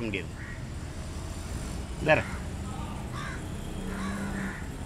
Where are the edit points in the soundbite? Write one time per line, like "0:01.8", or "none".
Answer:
none